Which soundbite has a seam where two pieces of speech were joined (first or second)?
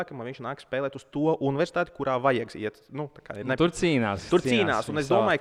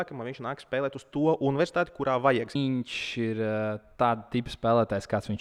second